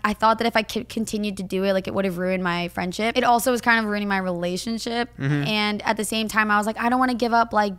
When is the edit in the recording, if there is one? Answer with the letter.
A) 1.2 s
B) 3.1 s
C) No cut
B